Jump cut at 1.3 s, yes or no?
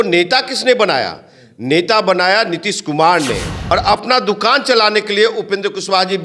no